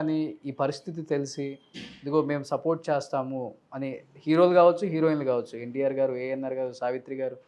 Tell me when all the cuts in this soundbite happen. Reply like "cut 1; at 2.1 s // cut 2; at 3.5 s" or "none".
none